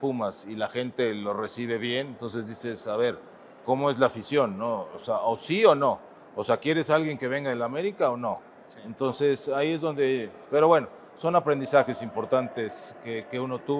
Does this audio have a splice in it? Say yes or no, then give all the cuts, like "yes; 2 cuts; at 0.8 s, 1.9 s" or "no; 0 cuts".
no; 0 cuts